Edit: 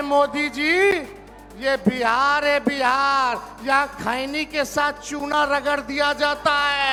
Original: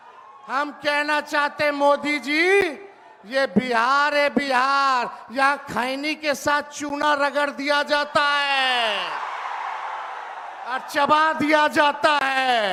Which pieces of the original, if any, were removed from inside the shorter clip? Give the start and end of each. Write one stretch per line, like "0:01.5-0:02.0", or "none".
none

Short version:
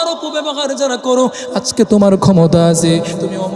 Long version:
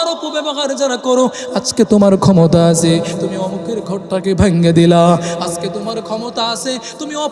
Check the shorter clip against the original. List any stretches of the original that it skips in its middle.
none

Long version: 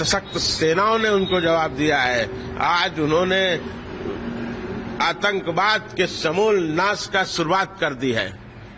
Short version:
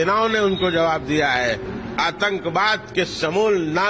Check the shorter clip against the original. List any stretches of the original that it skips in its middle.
0:02.4-0:04.7

